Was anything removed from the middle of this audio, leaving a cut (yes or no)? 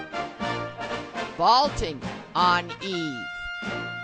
yes